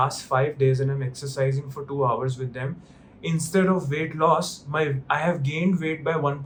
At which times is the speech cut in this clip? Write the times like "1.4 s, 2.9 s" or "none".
none

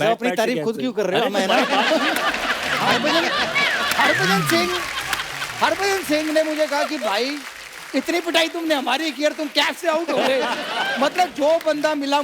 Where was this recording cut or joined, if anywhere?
2.8 s

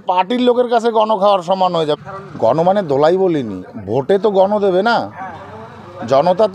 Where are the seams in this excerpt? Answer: 2.0 s, 3.7 s

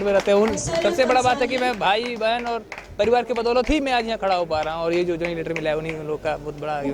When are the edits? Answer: none

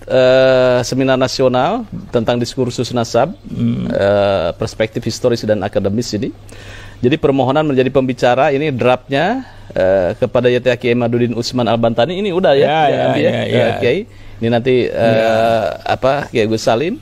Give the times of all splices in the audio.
none

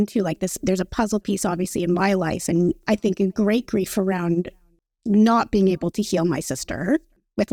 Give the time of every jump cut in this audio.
none

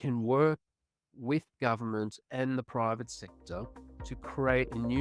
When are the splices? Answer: none

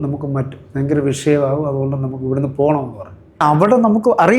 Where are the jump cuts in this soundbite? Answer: 3.4 s

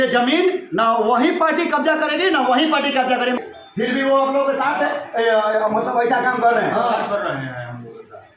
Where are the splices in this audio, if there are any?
3.4 s

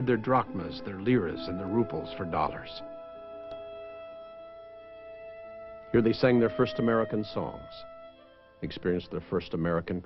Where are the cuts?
6.7 s

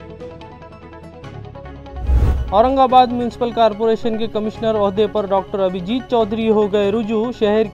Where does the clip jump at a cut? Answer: 2.4 s

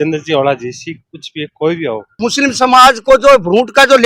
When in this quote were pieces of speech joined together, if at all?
2.1 s

